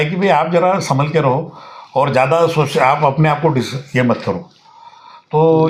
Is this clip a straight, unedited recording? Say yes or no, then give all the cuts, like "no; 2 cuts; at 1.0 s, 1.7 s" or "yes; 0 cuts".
yes; 0 cuts